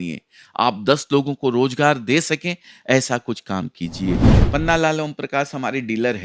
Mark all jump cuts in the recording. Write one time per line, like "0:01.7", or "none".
0:04.3